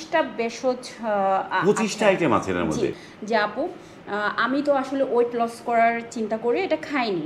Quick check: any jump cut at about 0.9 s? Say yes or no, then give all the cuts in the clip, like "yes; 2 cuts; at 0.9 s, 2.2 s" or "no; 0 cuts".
no; 1 cut; at 3.0 s